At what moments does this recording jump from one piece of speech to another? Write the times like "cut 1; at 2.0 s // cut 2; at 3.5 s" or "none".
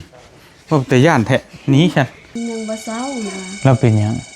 cut 1; at 2.2 s